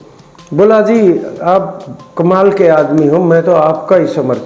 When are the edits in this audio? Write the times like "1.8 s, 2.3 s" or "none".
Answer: none